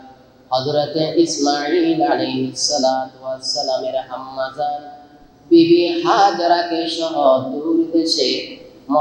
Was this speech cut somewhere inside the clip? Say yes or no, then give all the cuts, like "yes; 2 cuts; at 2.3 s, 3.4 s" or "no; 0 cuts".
no; 0 cuts